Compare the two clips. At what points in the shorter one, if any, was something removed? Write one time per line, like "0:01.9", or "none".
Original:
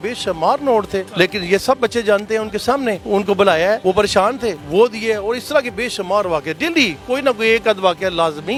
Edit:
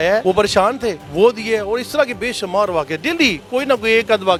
none

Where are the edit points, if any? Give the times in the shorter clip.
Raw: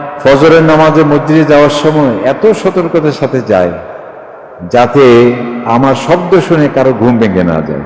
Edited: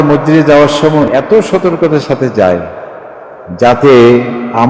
0:01.1

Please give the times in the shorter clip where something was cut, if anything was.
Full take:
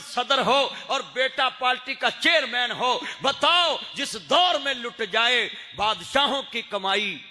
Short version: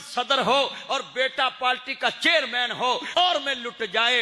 0:03.2

